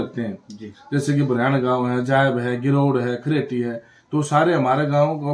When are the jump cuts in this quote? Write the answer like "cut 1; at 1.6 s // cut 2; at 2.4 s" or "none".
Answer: none